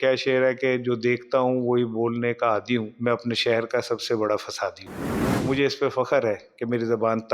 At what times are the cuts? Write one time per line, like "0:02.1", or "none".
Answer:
0:02.9
0:05.4

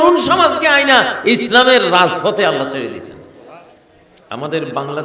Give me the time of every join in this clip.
0:03.4

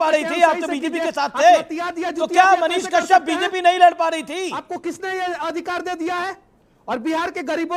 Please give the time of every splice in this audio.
none

